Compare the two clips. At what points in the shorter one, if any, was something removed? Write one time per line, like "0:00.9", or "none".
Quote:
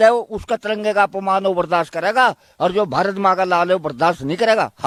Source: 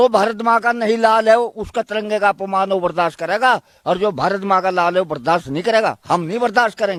none